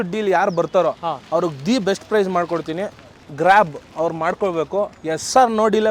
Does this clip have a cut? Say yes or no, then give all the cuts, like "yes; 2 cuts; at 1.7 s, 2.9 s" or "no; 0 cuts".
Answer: no; 0 cuts